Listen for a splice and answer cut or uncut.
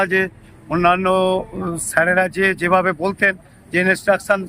uncut